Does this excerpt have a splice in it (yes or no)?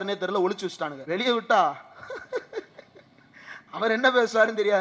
yes